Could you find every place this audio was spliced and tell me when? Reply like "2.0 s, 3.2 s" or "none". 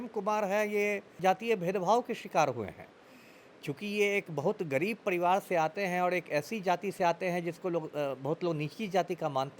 1.1 s